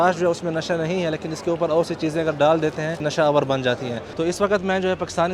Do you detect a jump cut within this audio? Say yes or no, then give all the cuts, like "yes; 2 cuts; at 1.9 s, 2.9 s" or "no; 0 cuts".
yes; 2 cuts; at 3.1 s, 4.1 s